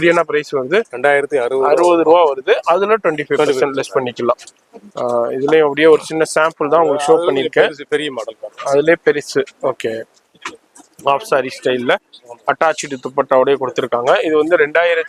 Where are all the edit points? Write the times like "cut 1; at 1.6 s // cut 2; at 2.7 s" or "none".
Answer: none